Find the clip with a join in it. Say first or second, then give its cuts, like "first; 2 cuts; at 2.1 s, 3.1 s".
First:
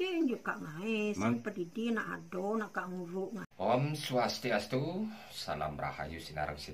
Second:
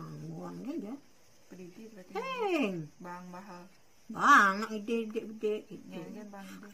first; 1 cut; at 3.5 s